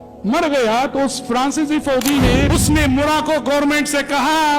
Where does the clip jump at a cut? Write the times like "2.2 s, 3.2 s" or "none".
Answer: 2.5 s

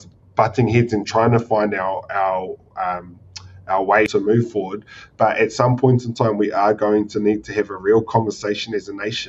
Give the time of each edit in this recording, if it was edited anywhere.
4.1 s

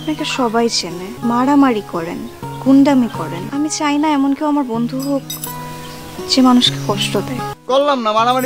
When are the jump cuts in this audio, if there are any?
1.1 s, 3.4 s, 7.5 s

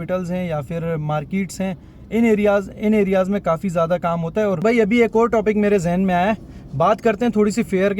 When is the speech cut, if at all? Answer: 4.6 s

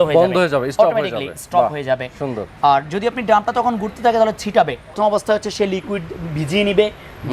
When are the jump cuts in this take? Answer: 5.0 s

